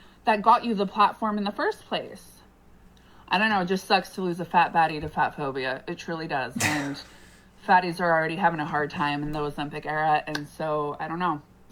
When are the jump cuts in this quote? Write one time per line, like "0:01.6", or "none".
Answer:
0:04.6
0:09.6